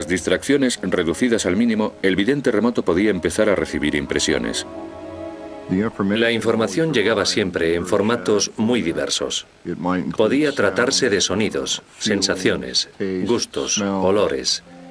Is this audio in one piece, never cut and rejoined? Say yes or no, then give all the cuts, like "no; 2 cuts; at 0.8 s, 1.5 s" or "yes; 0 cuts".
no; 1 cut; at 11.6 s